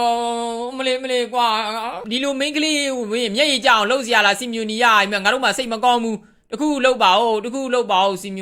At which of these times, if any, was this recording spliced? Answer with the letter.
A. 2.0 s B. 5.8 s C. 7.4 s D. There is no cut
A